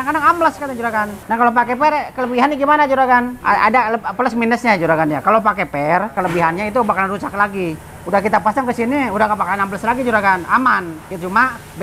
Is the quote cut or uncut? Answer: cut